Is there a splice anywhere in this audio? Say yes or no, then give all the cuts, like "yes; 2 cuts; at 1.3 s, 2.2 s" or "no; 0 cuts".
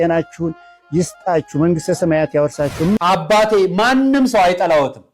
yes; 1 cut; at 3.0 s